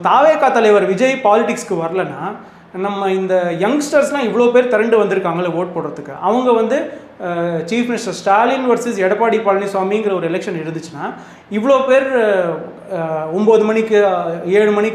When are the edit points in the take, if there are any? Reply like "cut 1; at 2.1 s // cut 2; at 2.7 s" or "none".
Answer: none